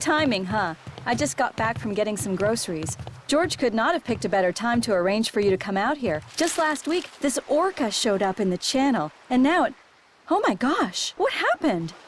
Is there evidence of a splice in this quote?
no; 0 cuts

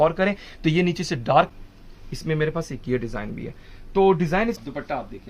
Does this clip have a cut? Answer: yes; 2 cuts; at 1.5 s, 4.6 s

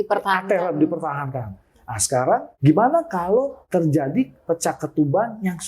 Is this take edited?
yes; 2 cuts; at 2.5 s, 3.6 s

